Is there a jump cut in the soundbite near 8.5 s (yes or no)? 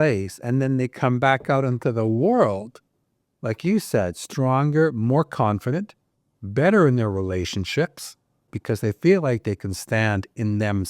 yes